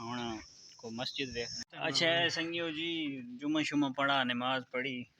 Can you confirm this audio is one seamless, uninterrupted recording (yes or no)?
no